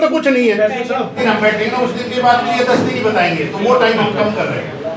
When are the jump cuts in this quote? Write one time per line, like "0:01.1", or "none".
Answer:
0:01.2